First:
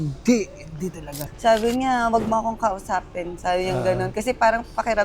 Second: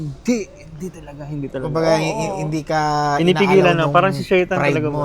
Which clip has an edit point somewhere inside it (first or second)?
first